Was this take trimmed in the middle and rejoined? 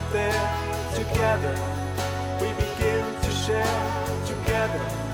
no; 0 cuts

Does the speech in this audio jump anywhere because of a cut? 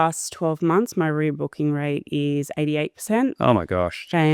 no; 0 cuts

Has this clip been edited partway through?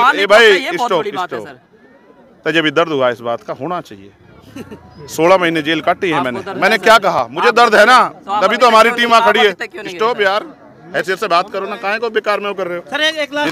no; 0 cuts

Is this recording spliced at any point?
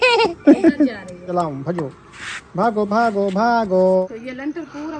yes; 2 cuts; at 1.2 s, 4.0 s

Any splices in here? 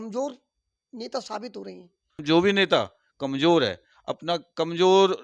yes; 1 cut; at 2.2 s

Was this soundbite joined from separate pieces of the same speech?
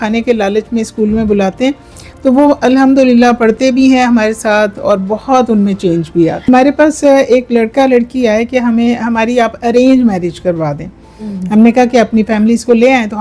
yes; 1 cut; at 6.4 s

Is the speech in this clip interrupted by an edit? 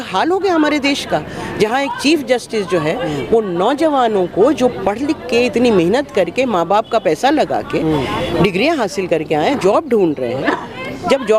no; 0 cuts

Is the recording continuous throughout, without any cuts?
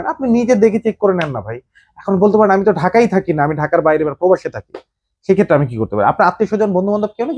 yes; 0 cuts

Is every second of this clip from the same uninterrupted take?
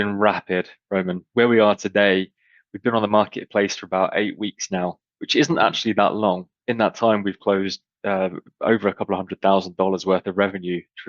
no; 2 cuts; at 1.2 s, 6.5 s

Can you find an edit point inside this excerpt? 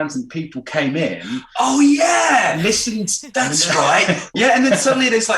yes; 2 cuts; at 3.2 s, 4.3 s

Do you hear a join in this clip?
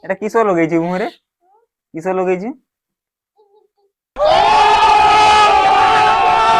no; 0 cuts

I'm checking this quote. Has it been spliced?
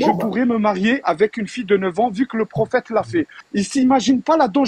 yes; 1 cut; at 3.4 s

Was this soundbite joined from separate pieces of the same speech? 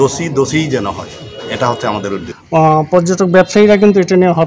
yes; 1 cut; at 2.3 s

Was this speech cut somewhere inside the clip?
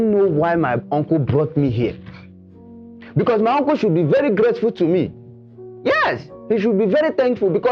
no; 0 cuts

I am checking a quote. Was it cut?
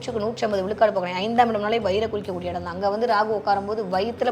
no; 0 cuts

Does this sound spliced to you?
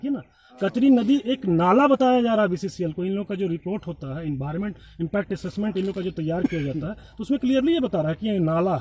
no; 0 cuts

